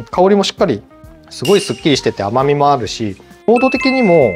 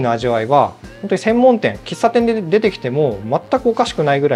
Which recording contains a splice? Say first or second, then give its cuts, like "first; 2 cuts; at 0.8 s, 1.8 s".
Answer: first; 2 cuts; at 0.9 s, 3.5 s